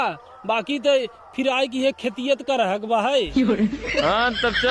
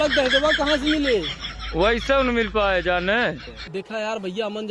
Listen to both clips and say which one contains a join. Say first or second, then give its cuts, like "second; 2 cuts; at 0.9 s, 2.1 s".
second; 1 cut; at 3.5 s